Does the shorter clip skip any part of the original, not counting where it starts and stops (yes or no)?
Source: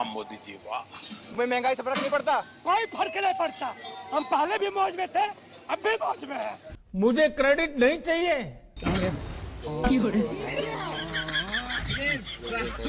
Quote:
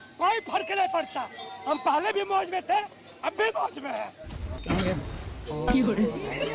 yes